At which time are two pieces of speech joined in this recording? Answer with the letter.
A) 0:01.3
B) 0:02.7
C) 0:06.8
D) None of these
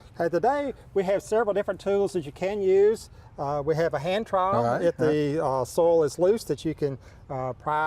A